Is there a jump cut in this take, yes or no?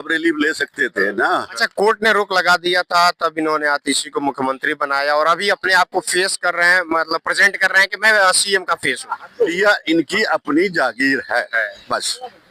yes